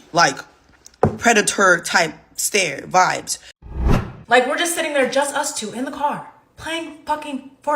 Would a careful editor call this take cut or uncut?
cut